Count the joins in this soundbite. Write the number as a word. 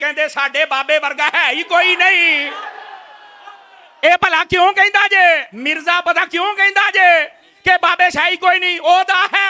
zero